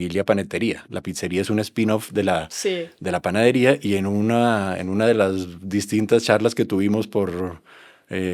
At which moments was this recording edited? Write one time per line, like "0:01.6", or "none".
none